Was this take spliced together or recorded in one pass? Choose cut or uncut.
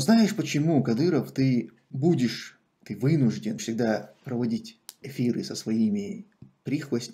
cut